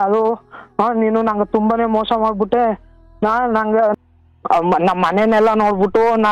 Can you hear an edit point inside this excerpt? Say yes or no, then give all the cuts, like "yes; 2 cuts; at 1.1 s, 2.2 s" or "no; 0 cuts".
yes; 1 cut; at 3.9 s